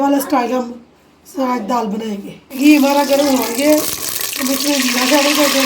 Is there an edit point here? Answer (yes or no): yes